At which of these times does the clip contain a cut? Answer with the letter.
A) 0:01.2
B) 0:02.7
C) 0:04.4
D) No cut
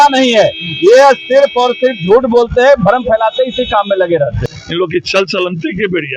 C